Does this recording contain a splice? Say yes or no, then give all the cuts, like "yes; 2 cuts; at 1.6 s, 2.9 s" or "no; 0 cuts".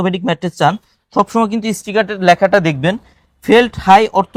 no; 0 cuts